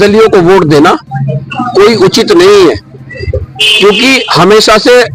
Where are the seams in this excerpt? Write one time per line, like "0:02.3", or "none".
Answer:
none